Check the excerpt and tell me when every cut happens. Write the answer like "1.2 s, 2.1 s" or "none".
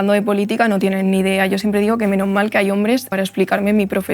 3.1 s